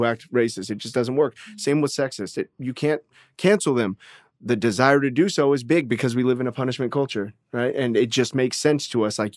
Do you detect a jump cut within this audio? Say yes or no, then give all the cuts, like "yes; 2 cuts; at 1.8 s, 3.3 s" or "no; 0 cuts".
no; 0 cuts